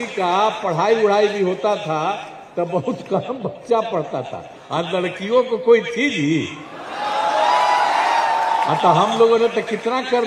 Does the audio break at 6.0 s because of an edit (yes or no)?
no